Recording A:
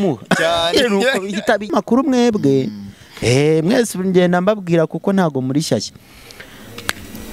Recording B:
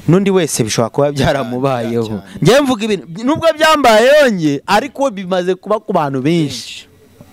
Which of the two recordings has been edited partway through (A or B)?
A